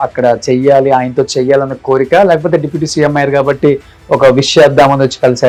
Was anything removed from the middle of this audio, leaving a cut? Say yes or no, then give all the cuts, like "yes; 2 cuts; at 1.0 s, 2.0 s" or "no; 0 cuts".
no; 0 cuts